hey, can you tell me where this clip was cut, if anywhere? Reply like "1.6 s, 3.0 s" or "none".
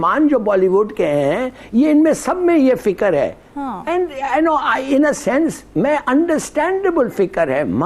none